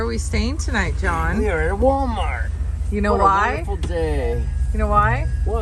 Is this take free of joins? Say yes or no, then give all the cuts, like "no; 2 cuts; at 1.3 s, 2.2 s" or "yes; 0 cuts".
yes; 0 cuts